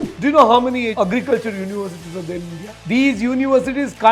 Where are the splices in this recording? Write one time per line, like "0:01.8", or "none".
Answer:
0:00.9
0:02.7